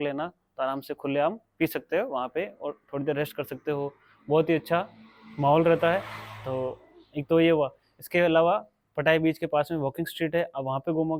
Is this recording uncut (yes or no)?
yes